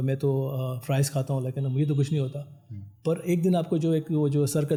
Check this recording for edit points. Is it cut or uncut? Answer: uncut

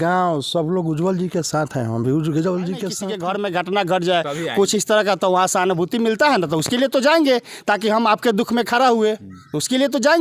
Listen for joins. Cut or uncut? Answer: cut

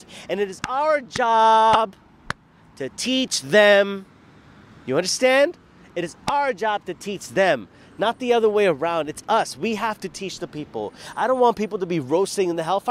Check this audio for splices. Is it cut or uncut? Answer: uncut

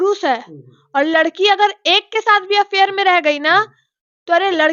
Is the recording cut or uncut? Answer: uncut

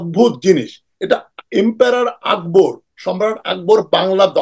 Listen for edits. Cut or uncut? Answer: uncut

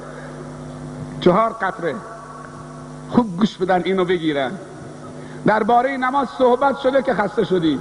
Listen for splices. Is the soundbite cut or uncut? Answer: uncut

